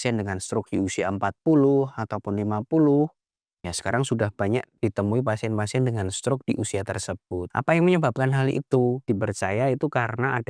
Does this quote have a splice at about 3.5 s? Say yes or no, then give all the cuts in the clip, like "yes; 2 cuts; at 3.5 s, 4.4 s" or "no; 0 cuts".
no; 3 cuts; at 4.8 s, 7.5 s, 9.0 s